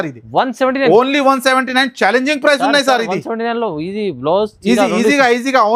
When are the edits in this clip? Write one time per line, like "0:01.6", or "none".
none